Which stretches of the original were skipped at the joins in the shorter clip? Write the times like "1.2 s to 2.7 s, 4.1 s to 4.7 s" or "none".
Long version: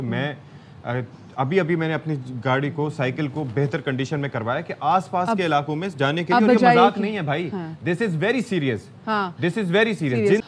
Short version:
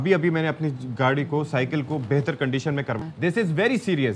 4.4 s to 7.6 s